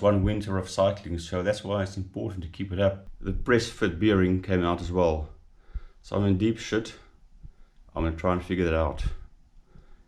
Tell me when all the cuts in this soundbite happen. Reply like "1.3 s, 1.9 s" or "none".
3.1 s

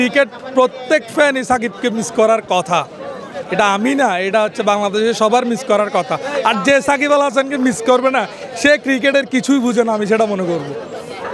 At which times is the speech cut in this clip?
none

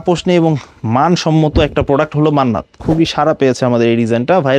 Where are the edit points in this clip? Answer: 2.8 s

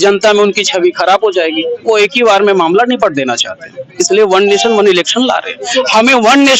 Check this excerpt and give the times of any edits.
none

